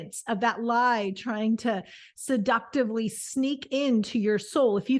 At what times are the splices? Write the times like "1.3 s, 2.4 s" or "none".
none